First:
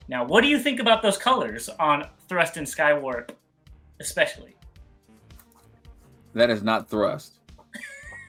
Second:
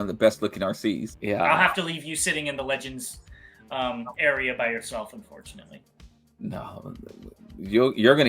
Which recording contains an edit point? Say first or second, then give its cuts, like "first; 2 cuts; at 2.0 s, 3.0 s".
second; 1 cut; at 1.1 s